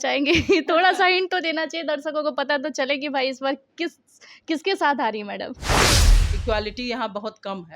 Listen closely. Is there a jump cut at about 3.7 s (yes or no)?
no